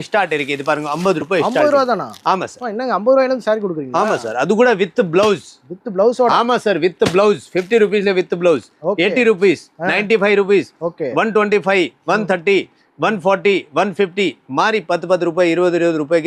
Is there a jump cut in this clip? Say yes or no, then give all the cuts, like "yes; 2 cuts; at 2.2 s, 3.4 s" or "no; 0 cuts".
no; 0 cuts